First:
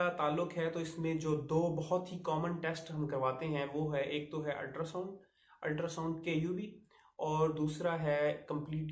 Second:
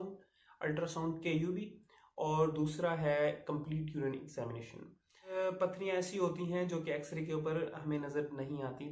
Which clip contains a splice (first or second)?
second